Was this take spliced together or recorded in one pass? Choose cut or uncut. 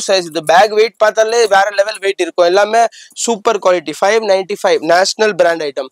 uncut